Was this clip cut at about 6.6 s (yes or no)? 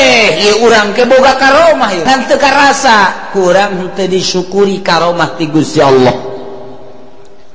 no